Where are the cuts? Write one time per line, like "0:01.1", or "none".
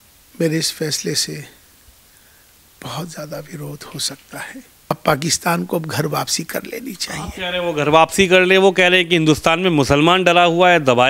0:04.8

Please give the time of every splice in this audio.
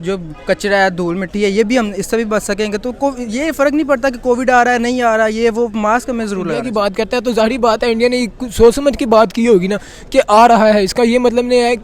0:06.6

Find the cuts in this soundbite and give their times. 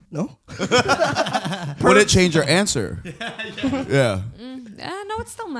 0:01.8

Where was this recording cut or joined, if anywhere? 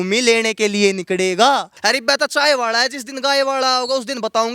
0:01.7

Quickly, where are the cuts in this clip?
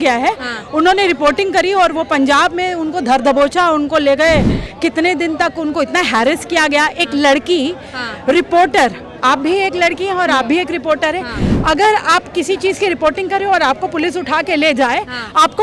none

